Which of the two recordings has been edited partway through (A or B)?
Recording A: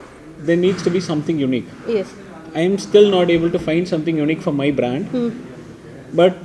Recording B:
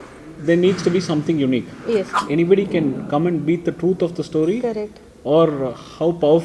B